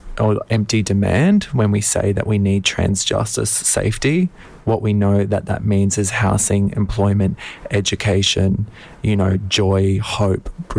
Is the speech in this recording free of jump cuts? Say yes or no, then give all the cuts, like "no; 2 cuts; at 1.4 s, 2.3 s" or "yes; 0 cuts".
yes; 0 cuts